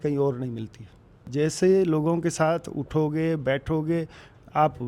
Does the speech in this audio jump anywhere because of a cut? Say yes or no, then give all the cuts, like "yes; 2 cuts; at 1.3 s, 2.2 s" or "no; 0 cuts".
yes; 1 cut; at 1.3 s